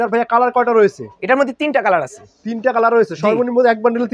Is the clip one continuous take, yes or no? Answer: yes